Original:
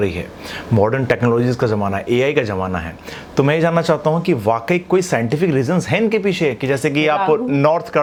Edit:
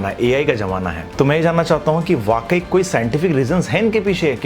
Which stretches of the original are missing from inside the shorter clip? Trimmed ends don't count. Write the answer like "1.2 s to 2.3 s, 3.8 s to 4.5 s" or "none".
2.9 s to 3.2 s